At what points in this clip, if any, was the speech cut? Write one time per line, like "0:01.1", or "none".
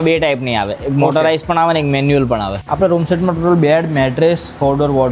0:02.6